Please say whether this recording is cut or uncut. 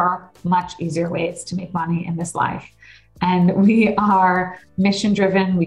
uncut